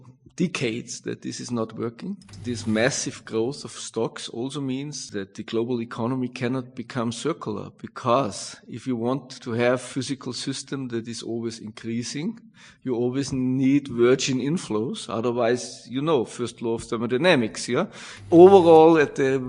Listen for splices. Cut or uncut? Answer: cut